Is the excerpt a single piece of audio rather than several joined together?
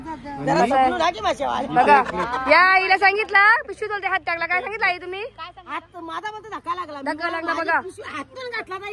yes; 0 cuts

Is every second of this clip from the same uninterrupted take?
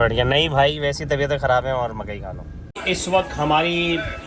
no; 1 cut; at 2.7 s

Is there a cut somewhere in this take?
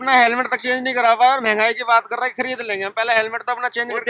no; 0 cuts

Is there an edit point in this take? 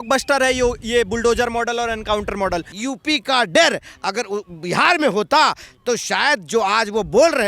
yes; 1 cut; at 2.7 s

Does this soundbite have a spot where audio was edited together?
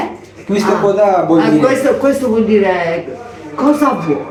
no; 0 cuts

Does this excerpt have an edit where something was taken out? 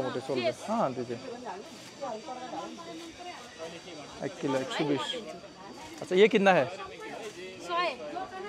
no; 0 cuts

